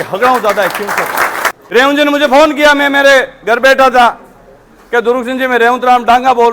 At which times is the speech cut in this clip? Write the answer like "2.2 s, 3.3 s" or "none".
1.5 s